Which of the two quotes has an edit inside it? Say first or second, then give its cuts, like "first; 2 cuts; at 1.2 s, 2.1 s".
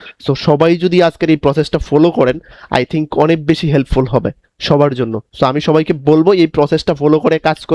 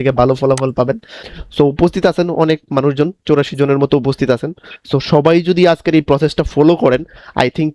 second; 1 cut; at 1.4 s